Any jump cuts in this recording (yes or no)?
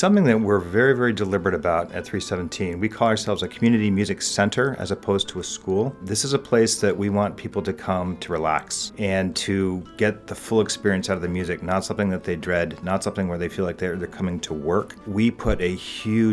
yes